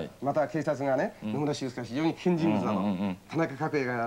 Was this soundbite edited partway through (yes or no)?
no